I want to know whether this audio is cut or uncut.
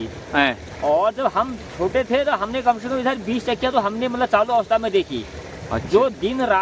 uncut